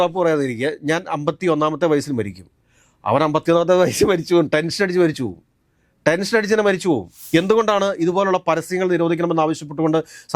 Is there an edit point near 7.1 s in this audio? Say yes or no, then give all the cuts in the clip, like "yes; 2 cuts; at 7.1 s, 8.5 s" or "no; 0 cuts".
yes; 1 cut; at 7.1 s